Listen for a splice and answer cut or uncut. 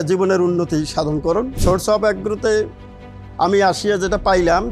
cut